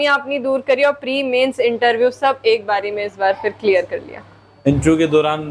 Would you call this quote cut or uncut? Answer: uncut